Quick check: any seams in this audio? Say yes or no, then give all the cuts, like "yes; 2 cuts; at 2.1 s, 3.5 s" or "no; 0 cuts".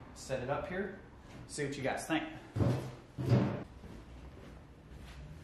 yes; 1 cut; at 3.7 s